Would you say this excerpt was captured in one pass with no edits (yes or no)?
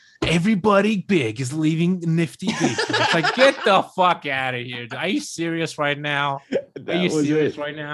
yes